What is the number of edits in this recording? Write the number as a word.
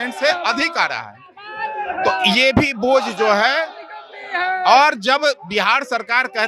zero